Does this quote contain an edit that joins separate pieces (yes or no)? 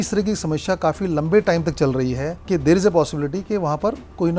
yes